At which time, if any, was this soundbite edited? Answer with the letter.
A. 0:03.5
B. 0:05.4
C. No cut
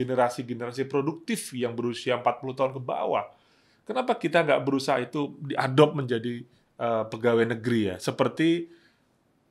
C